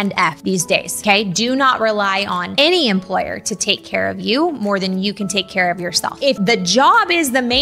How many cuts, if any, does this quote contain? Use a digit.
1